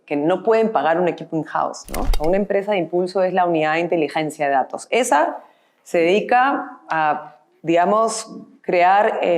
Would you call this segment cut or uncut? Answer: cut